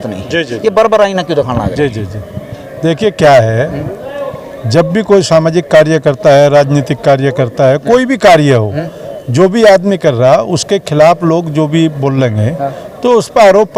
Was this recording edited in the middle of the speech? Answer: no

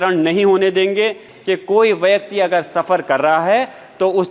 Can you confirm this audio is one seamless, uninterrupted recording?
no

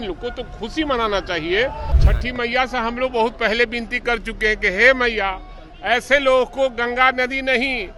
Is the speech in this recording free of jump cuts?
no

